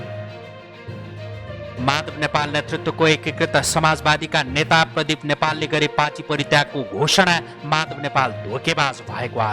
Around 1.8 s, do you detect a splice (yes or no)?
yes